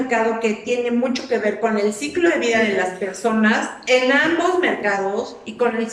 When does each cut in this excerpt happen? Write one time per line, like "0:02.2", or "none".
none